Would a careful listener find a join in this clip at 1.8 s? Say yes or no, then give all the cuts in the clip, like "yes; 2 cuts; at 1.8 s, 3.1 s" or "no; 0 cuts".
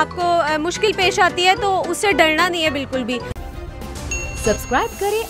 no; 1 cut; at 3.3 s